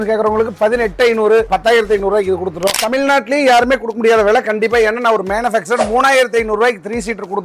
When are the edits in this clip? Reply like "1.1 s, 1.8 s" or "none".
1.5 s, 2.8 s